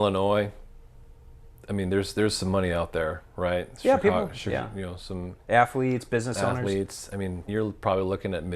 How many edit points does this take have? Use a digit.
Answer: 1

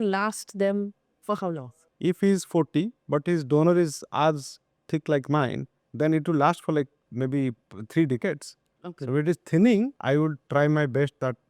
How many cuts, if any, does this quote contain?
2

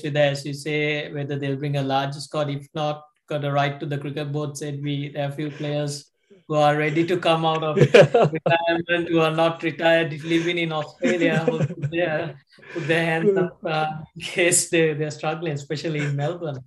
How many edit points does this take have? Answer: 0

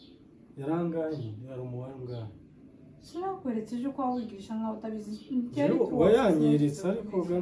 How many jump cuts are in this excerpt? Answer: 0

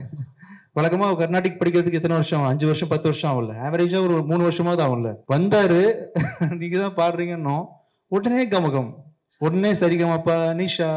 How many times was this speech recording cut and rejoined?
1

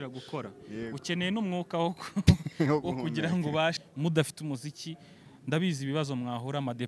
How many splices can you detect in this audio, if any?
1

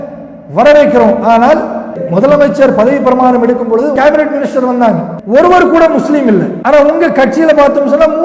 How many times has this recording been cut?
4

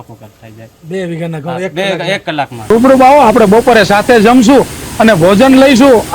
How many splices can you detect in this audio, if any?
1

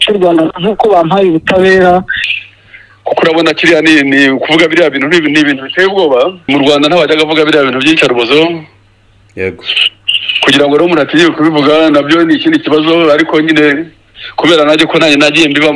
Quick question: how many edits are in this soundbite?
1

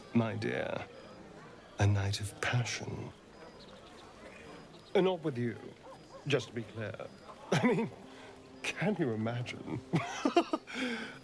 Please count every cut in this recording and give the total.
2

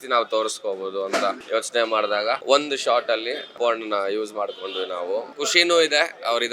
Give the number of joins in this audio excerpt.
4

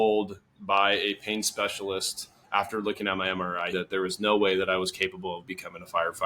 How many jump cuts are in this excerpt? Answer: 1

